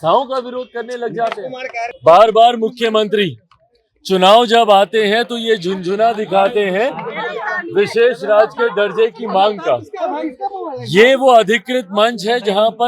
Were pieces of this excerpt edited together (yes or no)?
yes